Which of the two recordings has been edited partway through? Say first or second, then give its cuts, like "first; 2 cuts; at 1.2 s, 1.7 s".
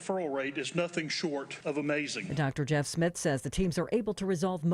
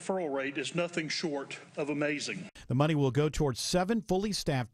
first; 1 cut; at 1.5 s